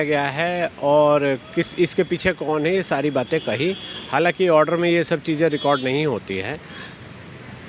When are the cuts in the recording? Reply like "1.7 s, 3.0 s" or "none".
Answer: none